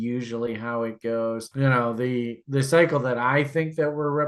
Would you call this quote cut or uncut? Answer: uncut